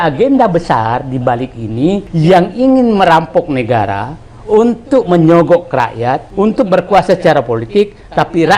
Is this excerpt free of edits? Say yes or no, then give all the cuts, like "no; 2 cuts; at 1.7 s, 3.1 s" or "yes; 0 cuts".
no; 2 cuts; at 2.1 s, 6.2 s